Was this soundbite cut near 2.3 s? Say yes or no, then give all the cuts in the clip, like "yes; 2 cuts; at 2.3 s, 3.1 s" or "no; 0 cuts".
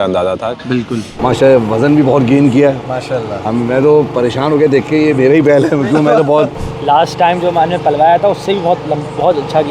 no; 2 cuts; at 1.1 s, 6.7 s